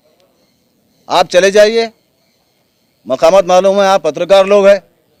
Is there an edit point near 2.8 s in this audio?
no; 0 cuts

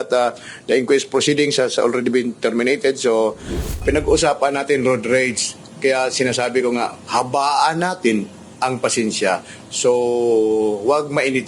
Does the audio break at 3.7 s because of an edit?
yes; 1 cut; at 3.7 s

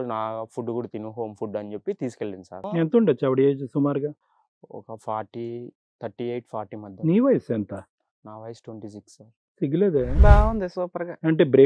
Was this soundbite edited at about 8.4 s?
no; 1 cut; at 2.7 s

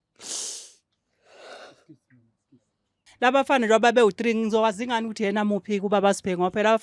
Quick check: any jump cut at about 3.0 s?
yes; 1 cut; at 3.0 s

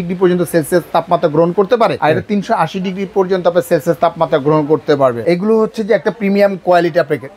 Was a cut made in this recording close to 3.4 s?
no; 2 cuts; at 2.0 s, 5.2 s

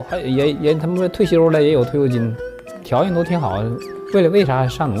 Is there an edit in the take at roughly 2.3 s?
no; 0 cuts

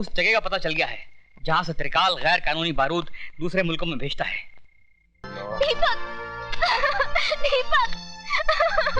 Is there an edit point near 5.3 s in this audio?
yes; 1 cut; at 5.3 s

